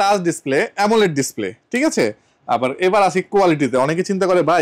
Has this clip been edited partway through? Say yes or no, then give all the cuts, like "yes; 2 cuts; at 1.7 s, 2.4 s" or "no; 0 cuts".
no; 0 cuts